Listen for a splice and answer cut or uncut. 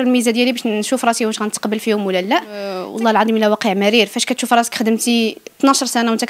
cut